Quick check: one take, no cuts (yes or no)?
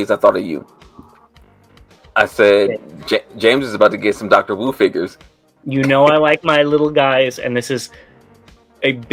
yes